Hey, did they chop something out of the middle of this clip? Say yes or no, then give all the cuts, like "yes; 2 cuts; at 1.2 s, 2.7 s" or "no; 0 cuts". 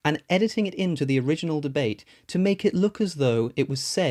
no; 0 cuts